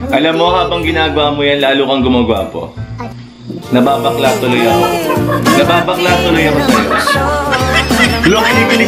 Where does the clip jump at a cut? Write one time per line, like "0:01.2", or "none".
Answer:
none

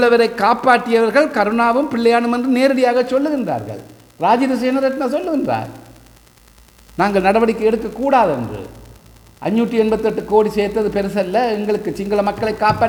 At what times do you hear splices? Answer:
none

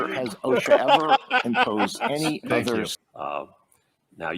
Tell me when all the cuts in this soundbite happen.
0:02.9

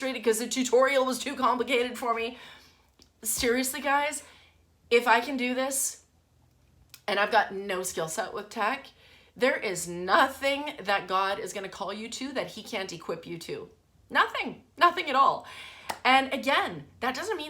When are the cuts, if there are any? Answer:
none

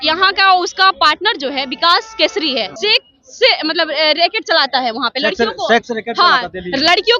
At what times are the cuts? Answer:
0:02.7

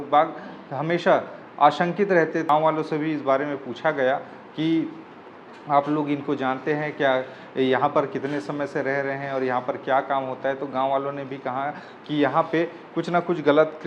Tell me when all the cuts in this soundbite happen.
0:02.5

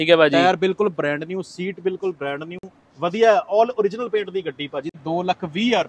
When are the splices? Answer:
0:04.9

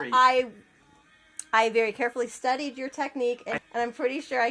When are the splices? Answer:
0:03.6

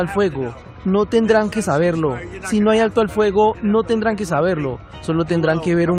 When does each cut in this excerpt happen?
none

